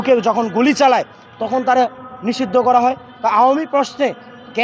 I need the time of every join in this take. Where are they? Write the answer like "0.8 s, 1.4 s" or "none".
none